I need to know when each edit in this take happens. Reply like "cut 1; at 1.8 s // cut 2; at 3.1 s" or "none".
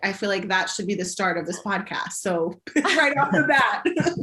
none